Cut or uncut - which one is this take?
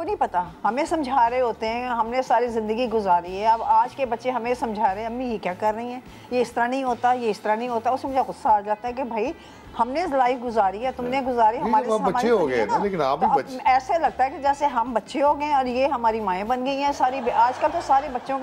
uncut